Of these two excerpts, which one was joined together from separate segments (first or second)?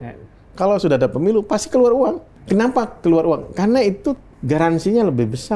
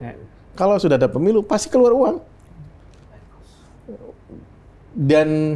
first